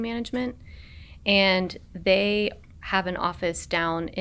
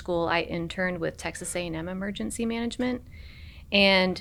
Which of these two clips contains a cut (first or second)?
first